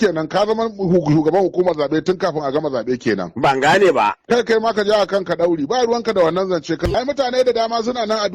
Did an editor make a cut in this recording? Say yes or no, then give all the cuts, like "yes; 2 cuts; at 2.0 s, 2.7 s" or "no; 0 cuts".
yes; 1 cut; at 6.8 s